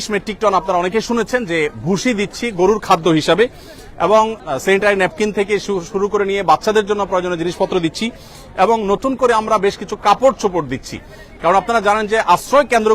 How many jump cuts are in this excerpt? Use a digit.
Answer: 0